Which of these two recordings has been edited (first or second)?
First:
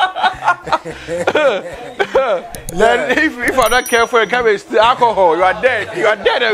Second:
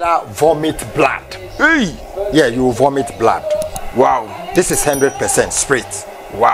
second